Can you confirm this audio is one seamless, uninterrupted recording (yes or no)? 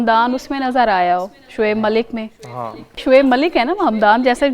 no